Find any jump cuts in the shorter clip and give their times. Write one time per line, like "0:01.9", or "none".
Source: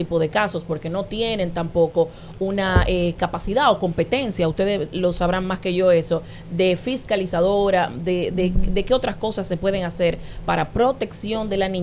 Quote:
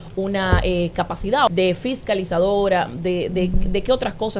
0:01.5